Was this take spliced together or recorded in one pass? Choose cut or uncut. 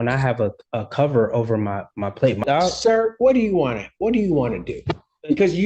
cut